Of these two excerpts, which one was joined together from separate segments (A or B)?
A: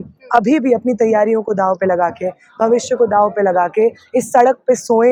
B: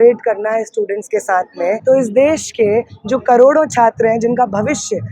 B